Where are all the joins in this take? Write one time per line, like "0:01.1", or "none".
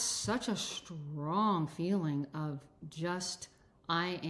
none